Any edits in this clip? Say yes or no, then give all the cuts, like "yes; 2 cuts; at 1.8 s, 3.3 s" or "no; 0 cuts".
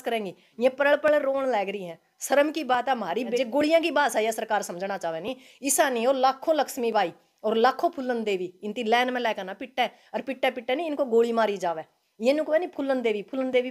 yes; 1 cut; at 3.4 s